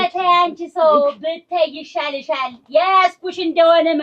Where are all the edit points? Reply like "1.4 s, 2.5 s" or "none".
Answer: none